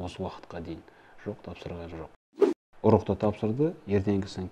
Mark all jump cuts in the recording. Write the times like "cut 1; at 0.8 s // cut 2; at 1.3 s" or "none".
cut 1; at 2.2 s